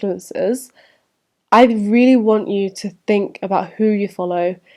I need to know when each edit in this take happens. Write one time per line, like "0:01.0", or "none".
none